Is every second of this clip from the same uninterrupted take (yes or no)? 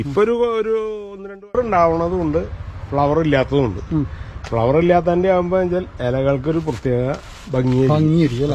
no